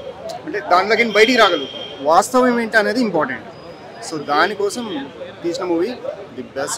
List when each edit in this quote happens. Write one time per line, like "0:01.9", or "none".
none